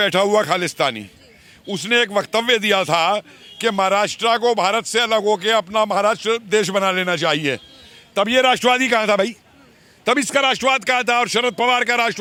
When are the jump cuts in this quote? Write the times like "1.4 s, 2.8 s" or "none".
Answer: none